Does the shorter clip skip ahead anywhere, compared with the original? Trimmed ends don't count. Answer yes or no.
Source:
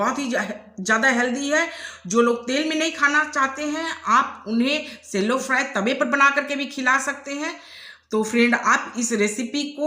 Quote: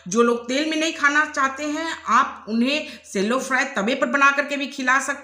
no